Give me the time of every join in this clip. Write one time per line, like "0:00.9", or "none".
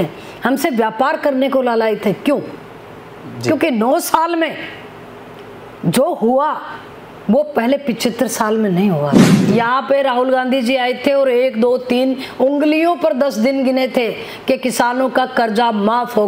0:09.3